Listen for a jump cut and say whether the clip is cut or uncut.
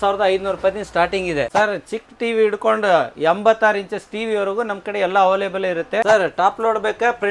cut